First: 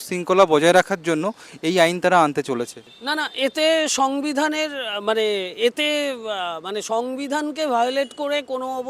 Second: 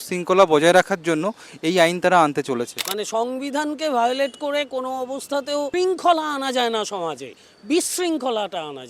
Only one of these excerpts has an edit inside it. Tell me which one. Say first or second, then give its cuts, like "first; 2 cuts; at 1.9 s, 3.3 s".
second; 2 cuts; at 2.9 s, 5.7 s